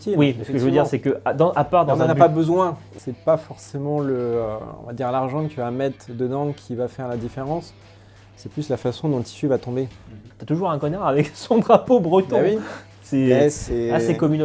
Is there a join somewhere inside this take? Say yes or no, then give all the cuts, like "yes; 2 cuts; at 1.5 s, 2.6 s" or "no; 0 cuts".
yes; 2 cuts; at 2.8 s, 10.3 s